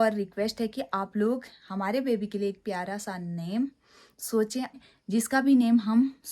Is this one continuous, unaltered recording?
no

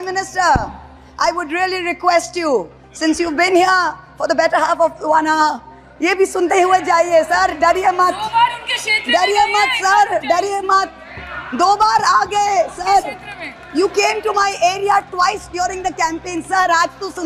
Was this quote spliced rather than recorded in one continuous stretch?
no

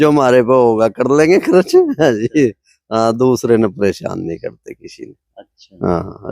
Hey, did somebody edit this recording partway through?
no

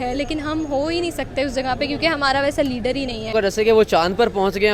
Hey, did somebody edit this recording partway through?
yes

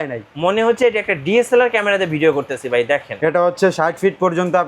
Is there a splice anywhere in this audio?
yes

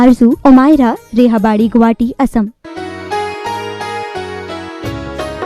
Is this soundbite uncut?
no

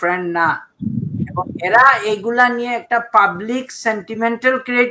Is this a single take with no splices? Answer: yes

